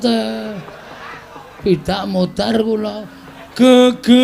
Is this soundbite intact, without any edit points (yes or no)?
yes